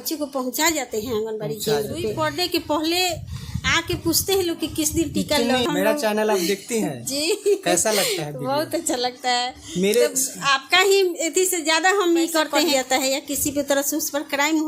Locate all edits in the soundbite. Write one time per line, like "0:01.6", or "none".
0:02.2
0:05.7
0:12.7

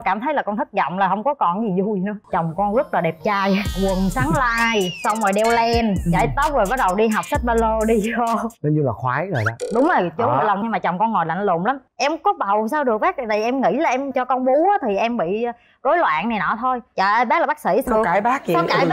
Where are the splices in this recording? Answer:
0:02.1
0:11.8

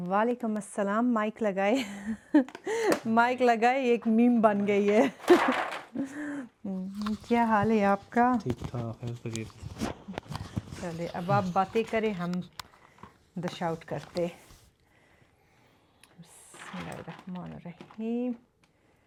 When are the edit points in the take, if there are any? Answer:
none

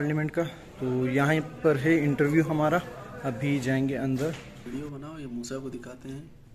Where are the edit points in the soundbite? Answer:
0:04.6

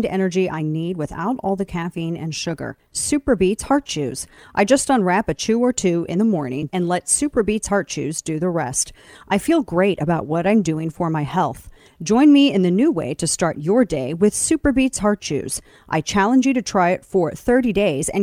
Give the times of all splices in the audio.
none

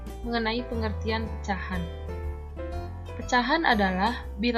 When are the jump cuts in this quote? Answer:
0:01.8
0:03.2

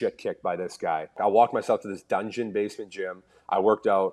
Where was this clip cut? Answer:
0:01.2

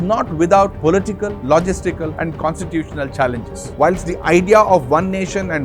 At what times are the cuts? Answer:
0:03.7

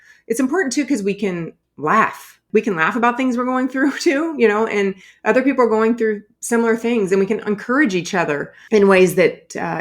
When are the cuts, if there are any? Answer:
0:02.4
0:06.3

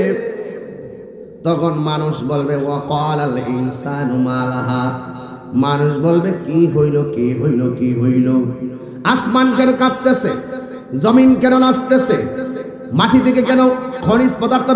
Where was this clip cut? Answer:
none

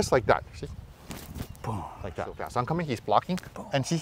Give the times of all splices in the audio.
0:02.4

